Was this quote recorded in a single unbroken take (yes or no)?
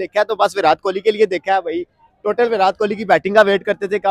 yes